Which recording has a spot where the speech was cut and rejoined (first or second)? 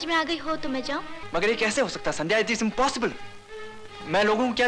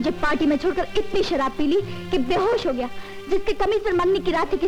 first